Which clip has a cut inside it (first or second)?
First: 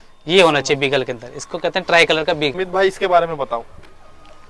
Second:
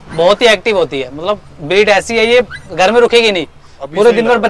first